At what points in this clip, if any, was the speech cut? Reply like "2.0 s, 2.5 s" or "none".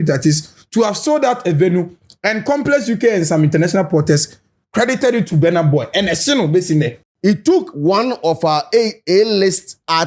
7.0 s